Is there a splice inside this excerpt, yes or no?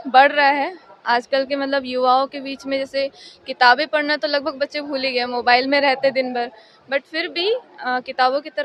no